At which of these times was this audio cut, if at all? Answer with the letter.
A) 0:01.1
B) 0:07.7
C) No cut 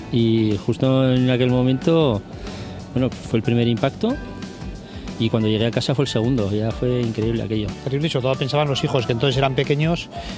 B